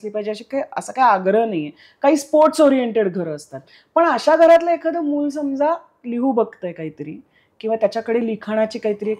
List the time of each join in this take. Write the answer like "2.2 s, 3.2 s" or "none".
none